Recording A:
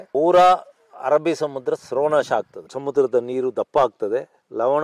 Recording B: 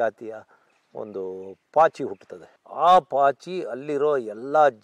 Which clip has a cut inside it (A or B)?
A